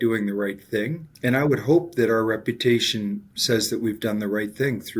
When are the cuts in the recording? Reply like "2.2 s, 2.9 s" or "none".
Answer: 1.2 s, 3.3 s